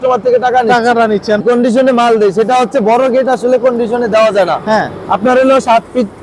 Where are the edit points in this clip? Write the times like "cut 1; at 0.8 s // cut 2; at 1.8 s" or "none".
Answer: cut 1; at 1.4 s